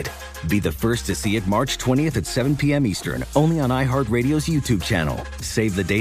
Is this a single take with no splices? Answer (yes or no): yes